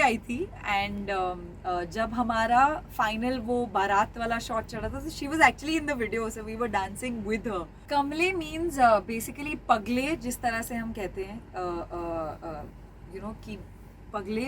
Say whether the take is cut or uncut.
cut